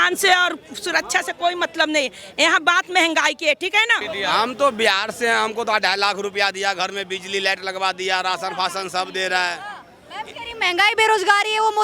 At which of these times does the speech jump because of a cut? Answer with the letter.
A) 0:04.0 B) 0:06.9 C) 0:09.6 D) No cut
A